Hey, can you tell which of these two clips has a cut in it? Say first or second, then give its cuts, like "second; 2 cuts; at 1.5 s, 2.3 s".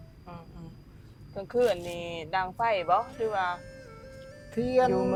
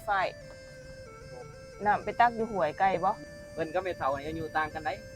second; 1 cut; at 3.2 s